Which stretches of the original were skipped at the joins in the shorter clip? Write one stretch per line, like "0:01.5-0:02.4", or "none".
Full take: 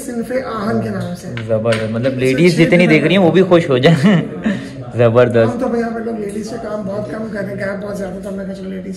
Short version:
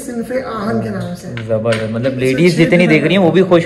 none

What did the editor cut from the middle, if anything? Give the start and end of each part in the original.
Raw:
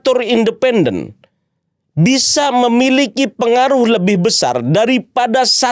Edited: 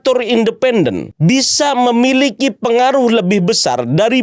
0:01.1-0:01.8

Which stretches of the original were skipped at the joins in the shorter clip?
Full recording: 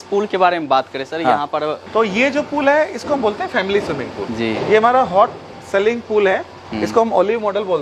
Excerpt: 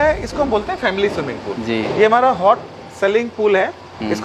none

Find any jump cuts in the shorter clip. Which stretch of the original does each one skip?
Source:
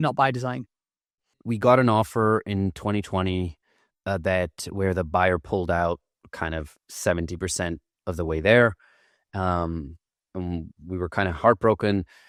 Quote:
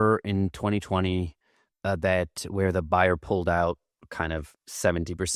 none

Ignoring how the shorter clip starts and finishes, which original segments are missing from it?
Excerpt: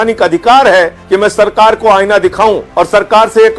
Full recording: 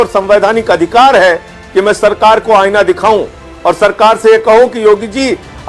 0:01.5-0:01.6
0:03.3-0:03.5

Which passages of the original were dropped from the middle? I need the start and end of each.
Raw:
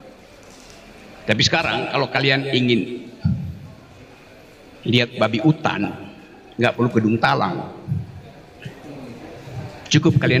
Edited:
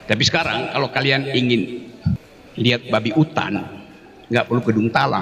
0:03.5-0:04.6

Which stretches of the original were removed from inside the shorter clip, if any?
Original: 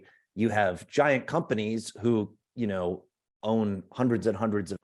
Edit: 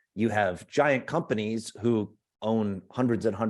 0:02.4-0:03.2

